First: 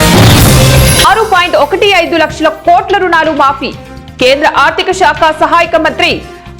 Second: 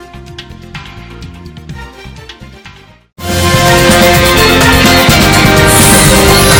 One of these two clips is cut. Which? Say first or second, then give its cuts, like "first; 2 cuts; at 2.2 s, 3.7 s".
first; 1 cut; at 1.0 s